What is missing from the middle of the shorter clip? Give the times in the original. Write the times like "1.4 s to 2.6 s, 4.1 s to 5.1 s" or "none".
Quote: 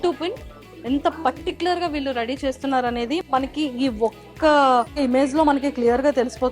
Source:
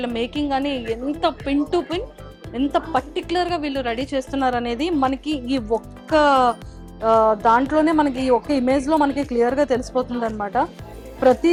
6.6 s to 8.5 s